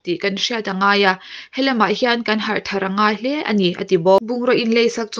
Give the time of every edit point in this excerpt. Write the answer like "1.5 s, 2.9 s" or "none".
4.3 s